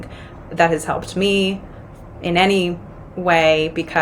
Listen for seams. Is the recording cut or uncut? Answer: uncut